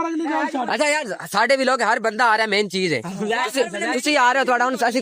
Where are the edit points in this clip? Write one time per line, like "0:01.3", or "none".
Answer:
none